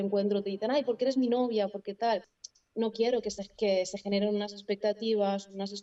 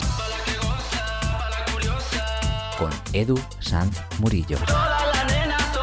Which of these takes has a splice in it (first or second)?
first